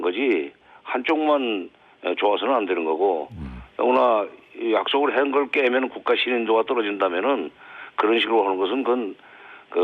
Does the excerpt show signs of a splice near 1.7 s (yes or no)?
no